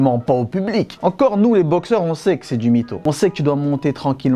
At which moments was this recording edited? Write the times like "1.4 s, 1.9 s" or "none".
none